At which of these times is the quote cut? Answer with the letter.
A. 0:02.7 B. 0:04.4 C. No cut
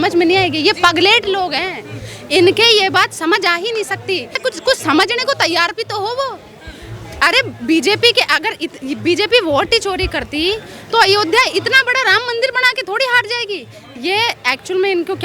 B